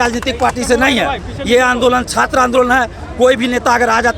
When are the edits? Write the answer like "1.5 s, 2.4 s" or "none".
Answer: none